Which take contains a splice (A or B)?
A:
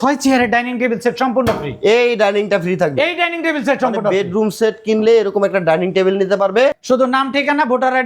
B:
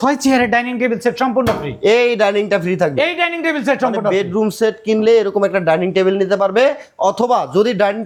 A